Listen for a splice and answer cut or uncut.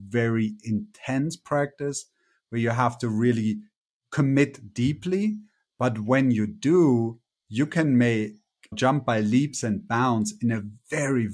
uncut